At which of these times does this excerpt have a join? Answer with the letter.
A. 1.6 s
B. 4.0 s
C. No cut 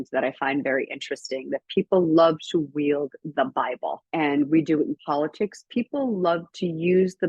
B